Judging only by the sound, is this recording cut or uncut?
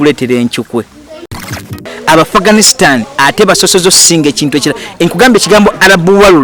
cut